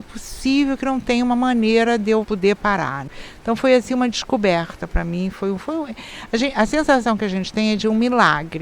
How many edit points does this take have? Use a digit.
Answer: 1